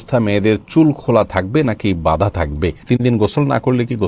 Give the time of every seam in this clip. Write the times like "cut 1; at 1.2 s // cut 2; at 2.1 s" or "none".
cut 1; at 2.8 s